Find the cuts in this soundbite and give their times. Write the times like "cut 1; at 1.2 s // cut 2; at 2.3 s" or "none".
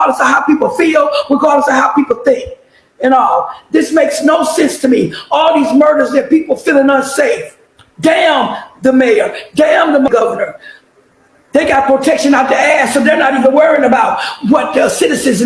none